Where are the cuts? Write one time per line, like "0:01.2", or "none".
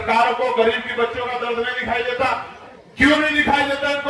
none